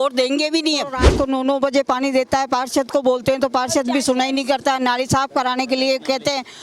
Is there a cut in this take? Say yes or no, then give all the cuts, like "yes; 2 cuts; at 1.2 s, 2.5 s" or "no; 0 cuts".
yes; 1 cut; at 1.0 s